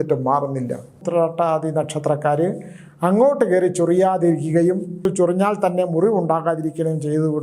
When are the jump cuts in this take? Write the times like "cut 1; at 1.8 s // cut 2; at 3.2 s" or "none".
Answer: cut 1; at 1.0 s // cut 2; at 5.1 s